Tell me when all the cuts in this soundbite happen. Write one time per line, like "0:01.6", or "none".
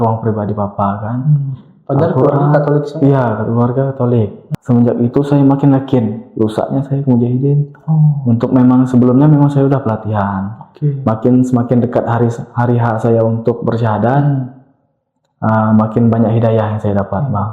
0:04.4